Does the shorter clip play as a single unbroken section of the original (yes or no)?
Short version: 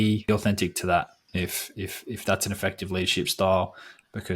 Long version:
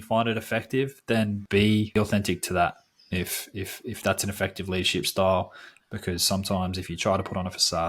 no